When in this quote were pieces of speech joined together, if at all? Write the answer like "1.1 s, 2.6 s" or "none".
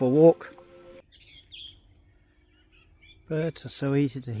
1.0 s